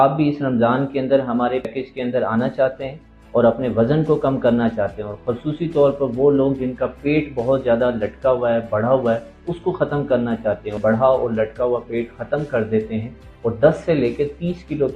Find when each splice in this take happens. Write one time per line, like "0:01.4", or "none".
0:01.7
0:10.8

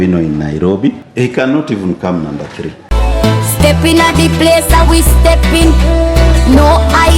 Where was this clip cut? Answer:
0:01.0
0:02.8

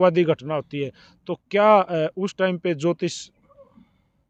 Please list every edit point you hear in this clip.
none

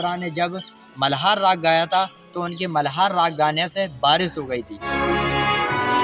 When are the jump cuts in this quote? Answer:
0:04.9

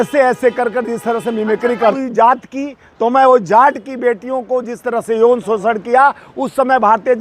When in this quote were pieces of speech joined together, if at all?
0:01.8

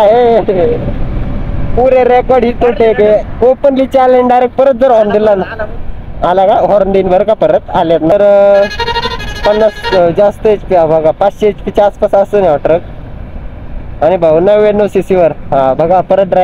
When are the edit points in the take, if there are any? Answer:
0:03.3
0:08.1

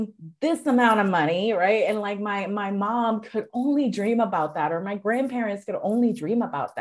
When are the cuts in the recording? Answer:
none

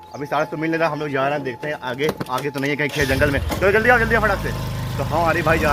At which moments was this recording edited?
none

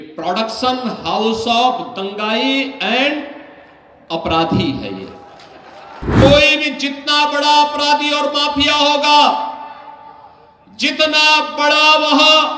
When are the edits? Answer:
0:06.2

